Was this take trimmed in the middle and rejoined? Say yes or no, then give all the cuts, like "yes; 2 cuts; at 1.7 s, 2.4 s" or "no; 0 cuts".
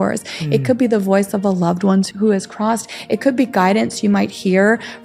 yes; 1 cut; at 2.1 s